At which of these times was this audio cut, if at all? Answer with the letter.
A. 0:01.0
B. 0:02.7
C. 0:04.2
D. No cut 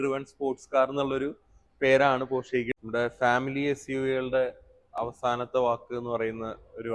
B